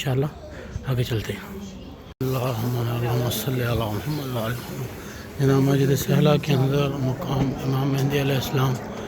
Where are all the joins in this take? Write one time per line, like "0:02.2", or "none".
0:02.0